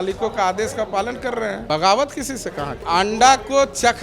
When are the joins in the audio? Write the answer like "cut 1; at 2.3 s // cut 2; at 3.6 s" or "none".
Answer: cut 1; at 1.6 s // cut 2; at 2.8 s